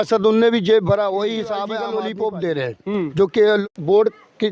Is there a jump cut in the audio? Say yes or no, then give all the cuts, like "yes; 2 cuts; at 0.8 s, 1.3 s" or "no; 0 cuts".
yes; 2 cuts; at 1.8 s, 3.7 s